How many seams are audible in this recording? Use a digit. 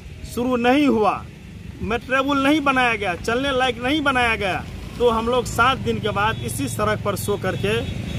0